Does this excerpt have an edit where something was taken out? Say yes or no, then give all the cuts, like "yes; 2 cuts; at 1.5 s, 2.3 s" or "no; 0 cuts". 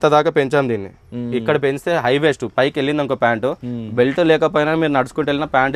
no; 0 cuts